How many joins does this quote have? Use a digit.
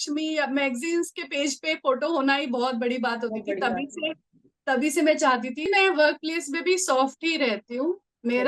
1